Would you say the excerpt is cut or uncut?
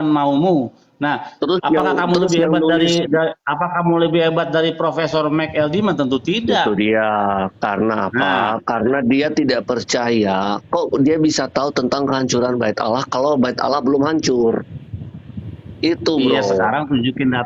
uncut